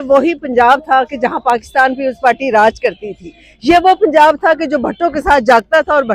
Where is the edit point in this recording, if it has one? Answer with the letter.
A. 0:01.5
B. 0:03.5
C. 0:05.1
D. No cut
D